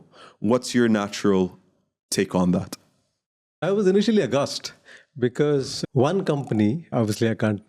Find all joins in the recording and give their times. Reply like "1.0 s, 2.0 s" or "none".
3.6 s, 5.7 s, 6.9 s